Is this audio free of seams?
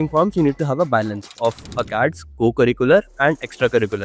yes; 0 cuts

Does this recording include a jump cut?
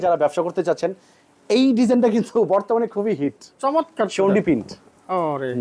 no; 0 cuts

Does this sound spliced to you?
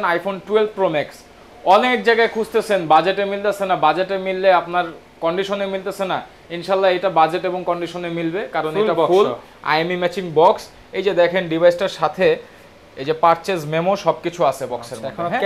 no; 0 cuts

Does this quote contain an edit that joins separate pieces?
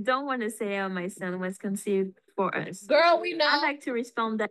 no; 0 cuts

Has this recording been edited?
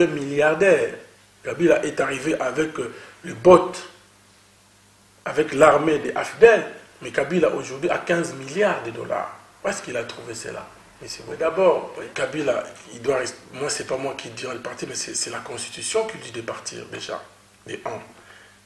yes; 1 cut; at 11.3 s

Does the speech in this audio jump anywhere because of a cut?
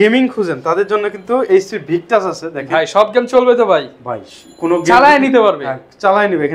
no; 0 cuts

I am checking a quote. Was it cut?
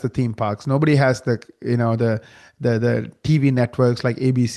no; 0 cuts

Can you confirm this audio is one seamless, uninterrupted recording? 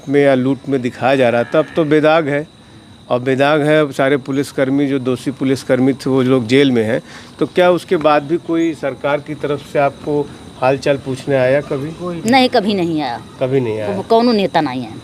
yes; 0 cuts

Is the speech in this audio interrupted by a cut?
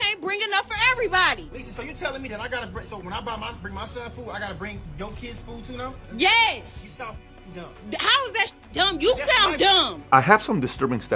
yes; 1 cut; at 10.0 s

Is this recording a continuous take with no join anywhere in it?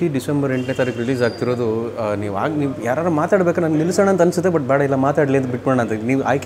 yes; 0 cuts

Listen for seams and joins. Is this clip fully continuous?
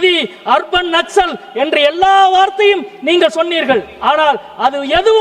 yes; 0 cuts

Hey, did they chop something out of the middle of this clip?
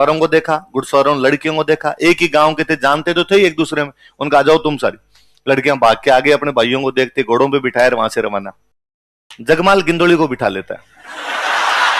no; 0 cuts

